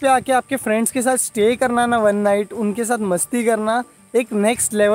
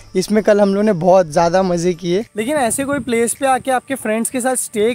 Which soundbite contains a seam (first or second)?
second